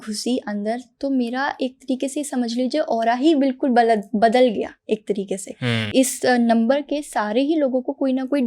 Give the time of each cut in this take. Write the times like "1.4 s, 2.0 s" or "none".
5.9 s